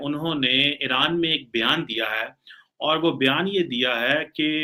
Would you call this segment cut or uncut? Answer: uncut